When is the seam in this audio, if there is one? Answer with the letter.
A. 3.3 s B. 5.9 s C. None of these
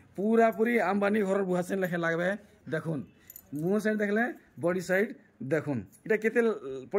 C